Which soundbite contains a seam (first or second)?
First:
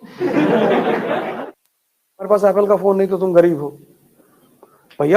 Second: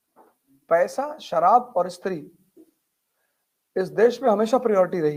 first